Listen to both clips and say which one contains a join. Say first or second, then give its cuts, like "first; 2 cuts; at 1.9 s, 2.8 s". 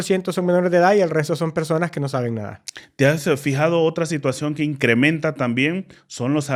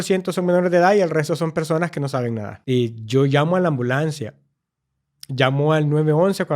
second; 1 cut; at 2.5 s